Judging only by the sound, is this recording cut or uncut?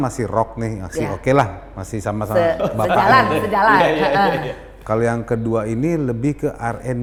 uncut